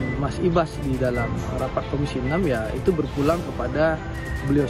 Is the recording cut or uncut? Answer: uncut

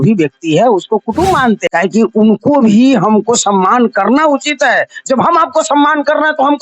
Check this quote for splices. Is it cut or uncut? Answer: cut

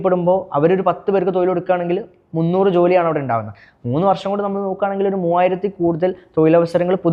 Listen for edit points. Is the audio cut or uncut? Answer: uncut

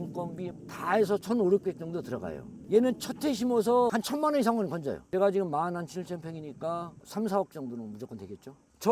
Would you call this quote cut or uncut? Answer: cut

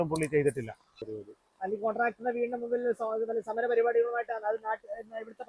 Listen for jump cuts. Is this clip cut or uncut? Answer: cut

